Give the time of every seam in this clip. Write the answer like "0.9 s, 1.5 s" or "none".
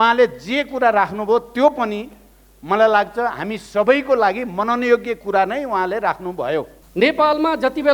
6.8 s

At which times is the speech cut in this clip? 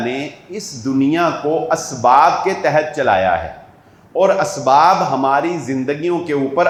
none

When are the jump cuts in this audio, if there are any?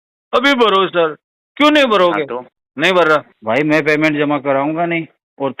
3.3 s

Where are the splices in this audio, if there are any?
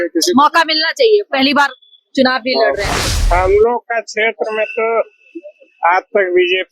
3.1 s

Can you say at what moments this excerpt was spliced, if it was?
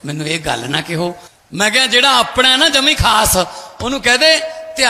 1.3 s

